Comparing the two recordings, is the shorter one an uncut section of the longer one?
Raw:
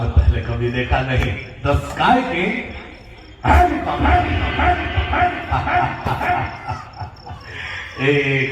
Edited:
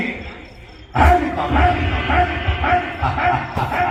yes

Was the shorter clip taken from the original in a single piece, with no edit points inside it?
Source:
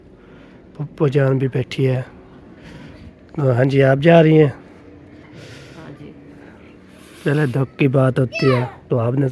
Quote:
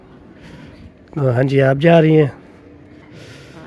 yes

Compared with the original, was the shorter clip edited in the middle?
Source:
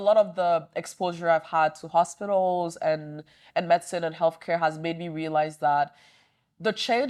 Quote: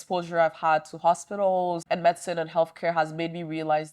yes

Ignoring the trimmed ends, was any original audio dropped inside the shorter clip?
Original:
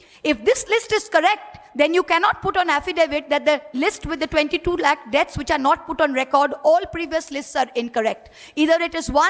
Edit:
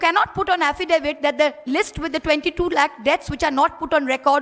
no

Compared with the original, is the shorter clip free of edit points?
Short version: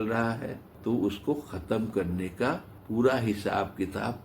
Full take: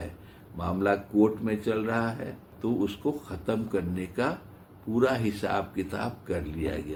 no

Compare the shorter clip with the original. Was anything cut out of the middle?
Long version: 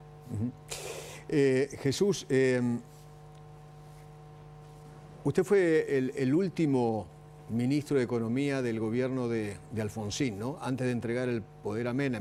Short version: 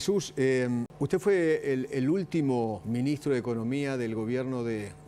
yes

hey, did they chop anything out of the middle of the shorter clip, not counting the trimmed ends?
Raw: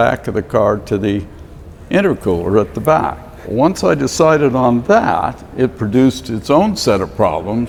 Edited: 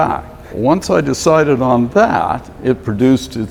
no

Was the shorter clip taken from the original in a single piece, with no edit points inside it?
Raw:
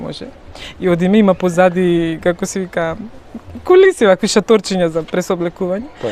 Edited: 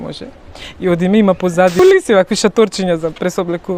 no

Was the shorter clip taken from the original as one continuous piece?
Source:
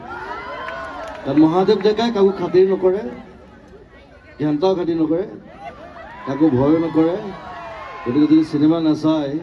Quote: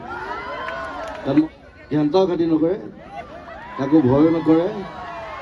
no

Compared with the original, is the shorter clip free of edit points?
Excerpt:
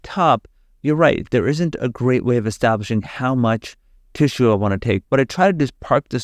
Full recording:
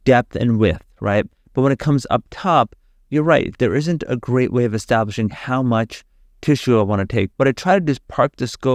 yes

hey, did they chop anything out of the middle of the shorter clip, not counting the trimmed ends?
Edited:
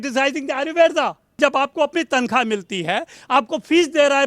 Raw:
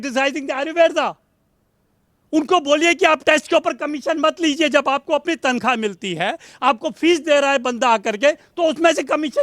yes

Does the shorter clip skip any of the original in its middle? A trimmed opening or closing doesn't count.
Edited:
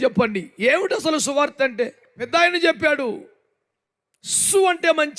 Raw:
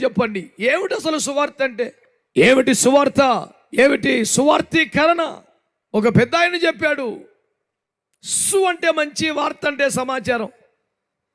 yes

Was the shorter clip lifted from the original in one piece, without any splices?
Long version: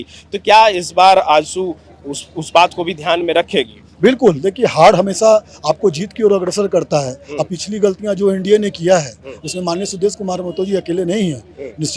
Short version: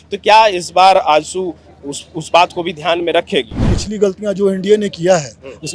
no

